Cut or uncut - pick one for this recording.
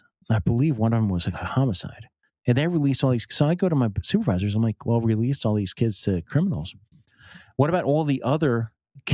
uncut